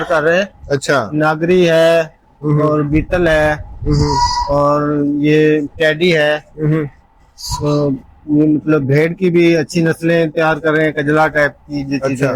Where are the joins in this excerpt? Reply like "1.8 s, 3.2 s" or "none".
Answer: none